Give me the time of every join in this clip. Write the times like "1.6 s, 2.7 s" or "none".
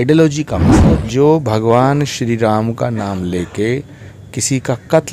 0.9 s